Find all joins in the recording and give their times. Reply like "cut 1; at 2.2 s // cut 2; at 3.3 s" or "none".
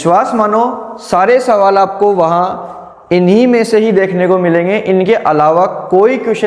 none